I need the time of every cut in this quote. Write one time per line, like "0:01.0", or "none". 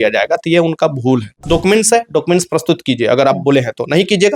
0:01.4